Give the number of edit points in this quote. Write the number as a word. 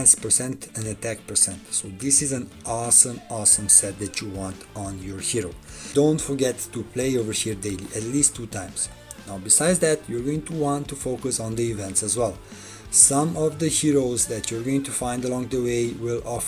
one